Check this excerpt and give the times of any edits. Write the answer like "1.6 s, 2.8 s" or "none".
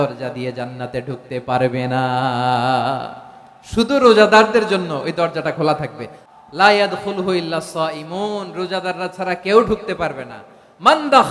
6.2 s